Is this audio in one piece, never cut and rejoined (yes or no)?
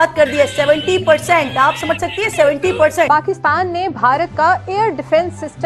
yes